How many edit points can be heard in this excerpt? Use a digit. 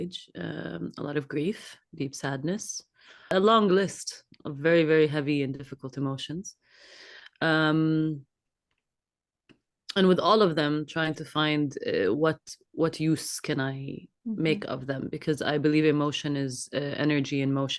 1